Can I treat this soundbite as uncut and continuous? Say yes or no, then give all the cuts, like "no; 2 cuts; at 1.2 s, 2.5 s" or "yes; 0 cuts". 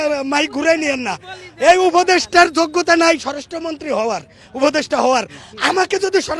yes; 0 cuts